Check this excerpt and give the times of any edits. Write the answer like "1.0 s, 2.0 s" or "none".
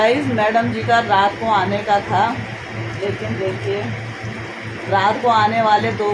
none